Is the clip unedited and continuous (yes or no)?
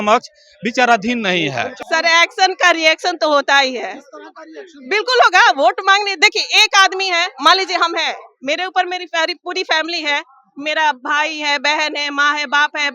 no